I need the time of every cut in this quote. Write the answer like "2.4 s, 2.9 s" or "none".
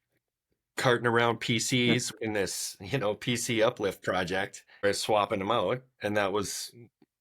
2.1 s, 4.8 s